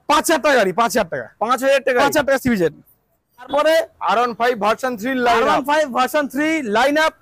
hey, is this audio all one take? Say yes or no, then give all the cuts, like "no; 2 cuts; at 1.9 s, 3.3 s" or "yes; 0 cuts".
no; 1 cut; at 3.5 s